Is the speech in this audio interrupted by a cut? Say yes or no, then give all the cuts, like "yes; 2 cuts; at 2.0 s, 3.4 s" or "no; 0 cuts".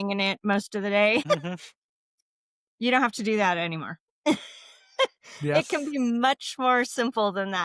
yes; 1 cut; at 1.2 s